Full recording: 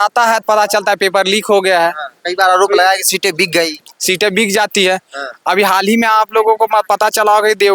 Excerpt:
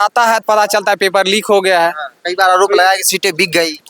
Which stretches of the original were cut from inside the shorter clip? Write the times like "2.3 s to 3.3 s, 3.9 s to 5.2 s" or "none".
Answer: none

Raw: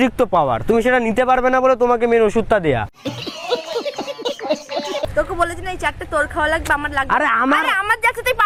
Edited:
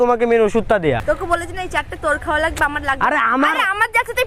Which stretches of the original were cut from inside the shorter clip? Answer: 2.8 s to 5.1 s

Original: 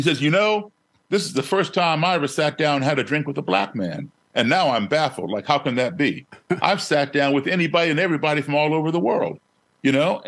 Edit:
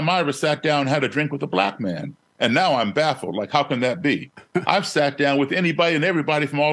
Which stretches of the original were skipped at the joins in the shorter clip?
none

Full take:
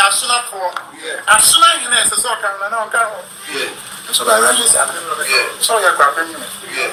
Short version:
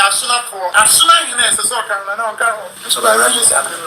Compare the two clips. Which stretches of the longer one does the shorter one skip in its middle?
0.7 s to 1.3 s, 3.3 s to 4.0 s

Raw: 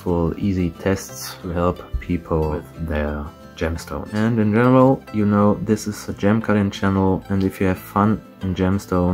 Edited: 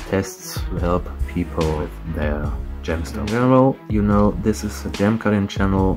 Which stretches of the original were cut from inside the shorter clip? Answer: 4.0 s to 4.5 s

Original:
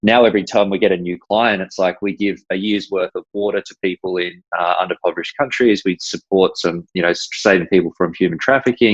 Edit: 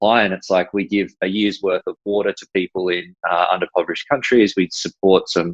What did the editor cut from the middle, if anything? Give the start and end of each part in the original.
none

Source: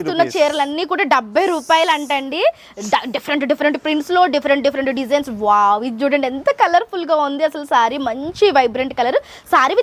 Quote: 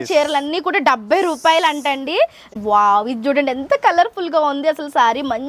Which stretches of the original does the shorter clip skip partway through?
2.8 s to 5.3 s

